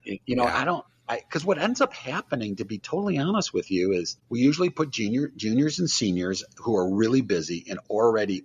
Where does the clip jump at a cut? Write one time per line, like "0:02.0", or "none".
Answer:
0:04.2